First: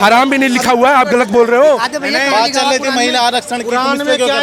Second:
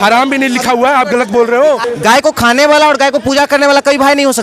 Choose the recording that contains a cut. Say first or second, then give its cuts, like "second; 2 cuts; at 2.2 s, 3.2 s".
second; 1 cut; at 1.9 s